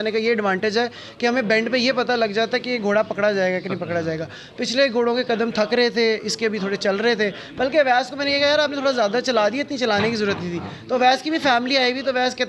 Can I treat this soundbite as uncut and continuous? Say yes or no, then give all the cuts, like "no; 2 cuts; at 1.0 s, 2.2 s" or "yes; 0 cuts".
yes; 0 cuts